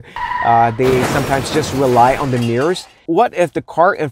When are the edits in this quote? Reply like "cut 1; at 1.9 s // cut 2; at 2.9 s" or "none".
cut 1; at 3.0 s